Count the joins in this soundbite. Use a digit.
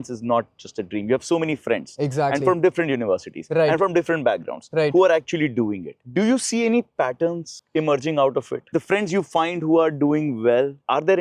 0